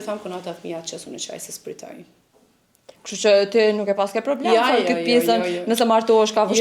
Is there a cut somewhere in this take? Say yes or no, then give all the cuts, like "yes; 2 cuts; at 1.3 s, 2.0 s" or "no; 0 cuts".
no; 0 cuts